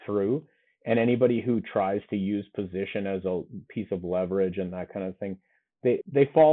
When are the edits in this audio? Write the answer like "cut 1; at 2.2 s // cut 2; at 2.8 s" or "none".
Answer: none